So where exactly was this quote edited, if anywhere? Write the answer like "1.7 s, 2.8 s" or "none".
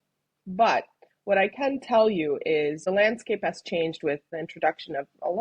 2.8 s, 4.3 s